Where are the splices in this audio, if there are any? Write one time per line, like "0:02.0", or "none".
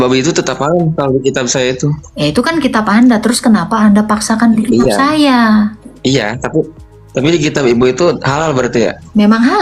none